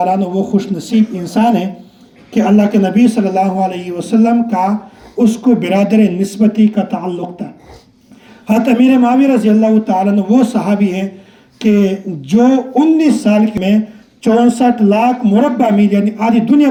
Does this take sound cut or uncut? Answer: uncut